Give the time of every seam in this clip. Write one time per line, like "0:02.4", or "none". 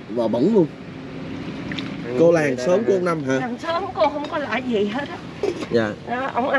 0:02.0